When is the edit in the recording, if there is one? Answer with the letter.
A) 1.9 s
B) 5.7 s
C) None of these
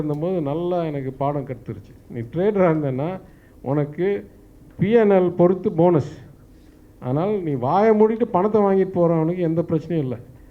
C